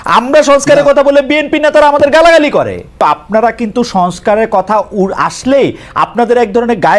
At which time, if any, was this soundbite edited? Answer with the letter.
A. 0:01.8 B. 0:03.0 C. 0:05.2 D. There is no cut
B